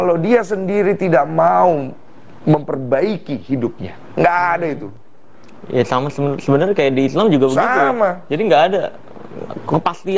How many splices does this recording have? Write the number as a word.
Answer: zero